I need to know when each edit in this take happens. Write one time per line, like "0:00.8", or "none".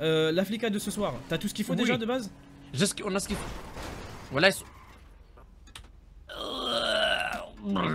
none